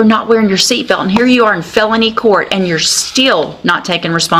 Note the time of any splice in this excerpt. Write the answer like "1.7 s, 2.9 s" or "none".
none